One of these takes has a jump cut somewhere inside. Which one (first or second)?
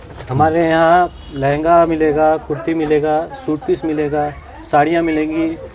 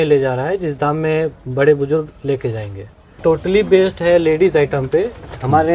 second